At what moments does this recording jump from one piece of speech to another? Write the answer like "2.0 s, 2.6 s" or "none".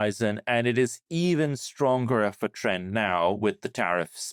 none